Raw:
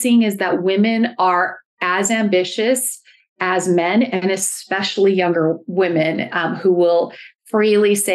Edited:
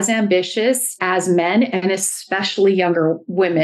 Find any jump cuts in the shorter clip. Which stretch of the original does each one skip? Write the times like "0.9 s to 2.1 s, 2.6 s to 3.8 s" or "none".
2.9 s to 3.3 s